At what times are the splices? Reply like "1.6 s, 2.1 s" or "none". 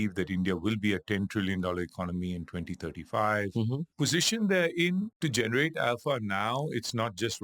3.9 s, 5.1 s